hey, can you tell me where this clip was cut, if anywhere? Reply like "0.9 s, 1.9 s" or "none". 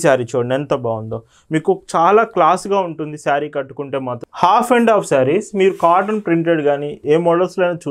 4.2 s